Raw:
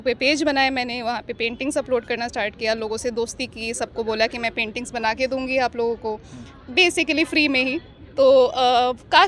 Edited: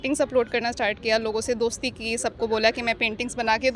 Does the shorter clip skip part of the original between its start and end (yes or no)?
no